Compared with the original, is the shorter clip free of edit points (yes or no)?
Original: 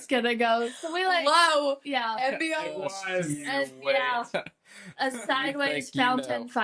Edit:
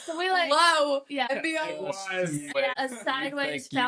no